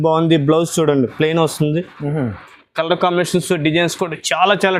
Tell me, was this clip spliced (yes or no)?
no